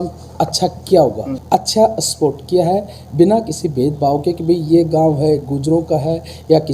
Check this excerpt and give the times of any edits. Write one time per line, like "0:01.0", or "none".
0:01.3